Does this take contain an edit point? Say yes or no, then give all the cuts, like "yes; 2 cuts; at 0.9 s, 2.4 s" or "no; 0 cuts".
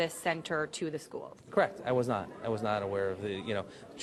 no; 0 cuts